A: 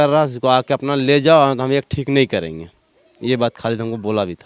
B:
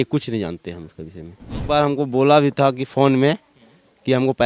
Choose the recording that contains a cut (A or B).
B